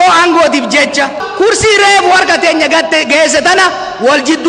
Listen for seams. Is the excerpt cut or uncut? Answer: cut